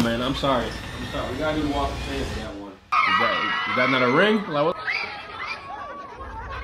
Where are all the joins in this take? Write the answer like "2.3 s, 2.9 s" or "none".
2.7 s

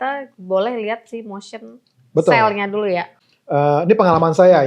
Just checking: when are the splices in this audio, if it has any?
3.2 s

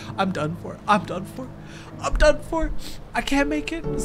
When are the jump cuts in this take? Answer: none

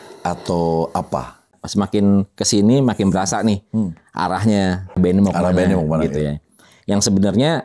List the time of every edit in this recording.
1.5 s, 4.9 s

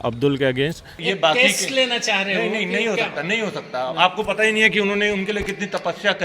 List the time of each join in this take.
0.9 s

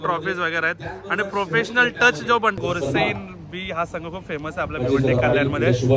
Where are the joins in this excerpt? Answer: 2.6 s

